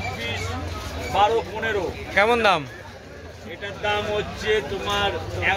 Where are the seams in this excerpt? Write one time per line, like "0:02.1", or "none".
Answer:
none